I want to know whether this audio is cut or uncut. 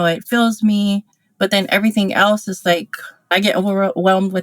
cut